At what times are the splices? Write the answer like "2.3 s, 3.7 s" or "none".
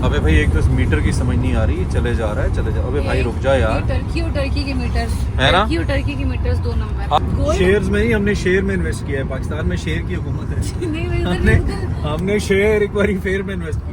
7.2 s